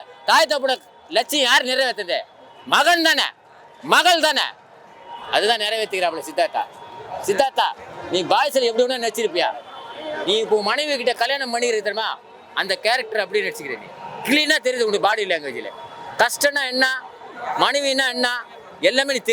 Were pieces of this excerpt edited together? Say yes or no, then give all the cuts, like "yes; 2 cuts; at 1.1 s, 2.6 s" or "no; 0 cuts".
no; 0 cuts